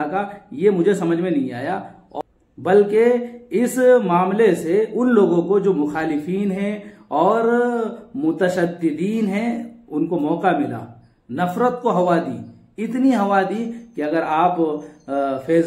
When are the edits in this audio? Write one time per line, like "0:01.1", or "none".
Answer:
0:02.0